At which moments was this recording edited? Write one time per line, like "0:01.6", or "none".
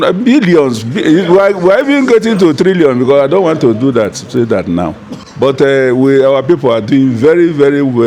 none